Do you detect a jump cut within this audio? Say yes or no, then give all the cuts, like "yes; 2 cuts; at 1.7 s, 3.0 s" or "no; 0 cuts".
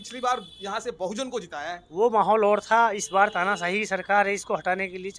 no; 0 cuts